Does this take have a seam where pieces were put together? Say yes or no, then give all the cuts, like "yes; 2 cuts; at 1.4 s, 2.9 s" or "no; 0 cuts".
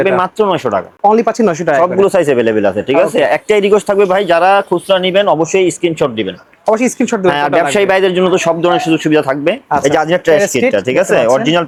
no; 0 cuts